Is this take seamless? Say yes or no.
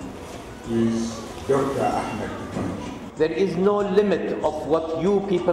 no